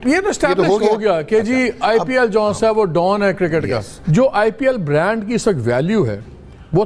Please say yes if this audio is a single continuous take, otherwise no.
no